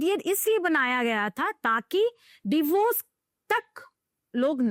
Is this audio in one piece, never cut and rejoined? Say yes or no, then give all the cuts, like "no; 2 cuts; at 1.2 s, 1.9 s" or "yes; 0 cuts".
yes; 0 cuts